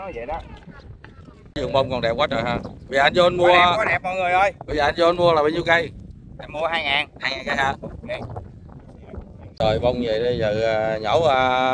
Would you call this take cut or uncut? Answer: cut